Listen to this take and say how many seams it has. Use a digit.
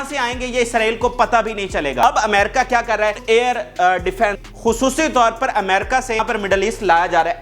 4